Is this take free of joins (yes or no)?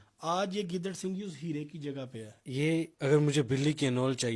no